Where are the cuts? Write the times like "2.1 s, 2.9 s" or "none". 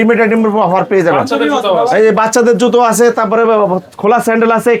none

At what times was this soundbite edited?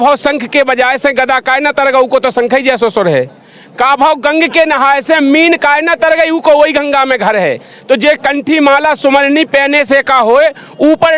none

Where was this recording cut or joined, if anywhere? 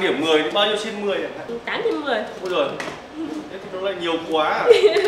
none

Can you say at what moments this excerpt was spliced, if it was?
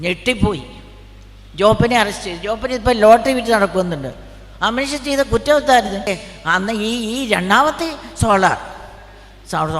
6.0 s

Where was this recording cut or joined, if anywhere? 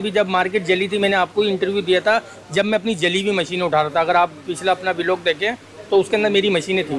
none

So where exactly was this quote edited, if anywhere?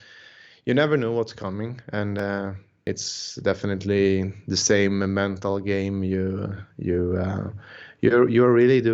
2.8 s

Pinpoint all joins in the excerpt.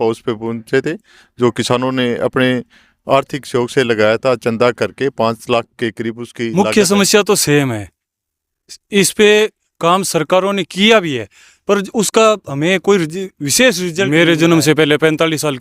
6.5 s, 14.1 s

